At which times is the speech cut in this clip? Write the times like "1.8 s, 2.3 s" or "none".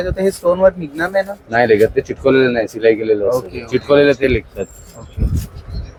none